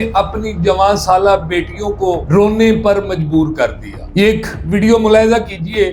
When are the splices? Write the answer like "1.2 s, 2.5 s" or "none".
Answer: none